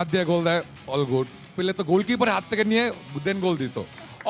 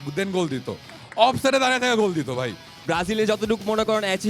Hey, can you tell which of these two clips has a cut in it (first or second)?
second